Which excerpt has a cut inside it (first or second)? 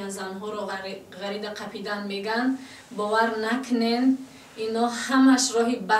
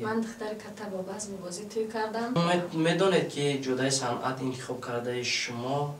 second